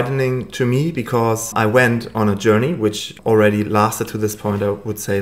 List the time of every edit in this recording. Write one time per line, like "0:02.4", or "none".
0:01.5
0:03.1